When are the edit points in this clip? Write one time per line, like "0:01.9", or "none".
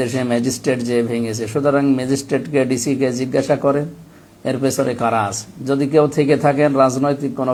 none